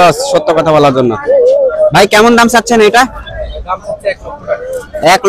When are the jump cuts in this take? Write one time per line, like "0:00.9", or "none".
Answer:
none